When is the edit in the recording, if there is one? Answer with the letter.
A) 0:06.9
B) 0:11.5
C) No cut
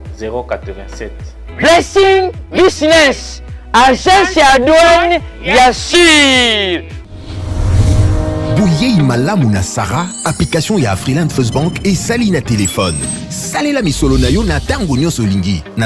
A